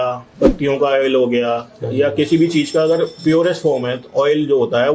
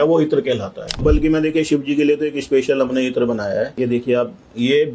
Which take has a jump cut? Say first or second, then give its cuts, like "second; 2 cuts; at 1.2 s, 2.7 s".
second; 2 cuts; at 1.0 s, 3.7 s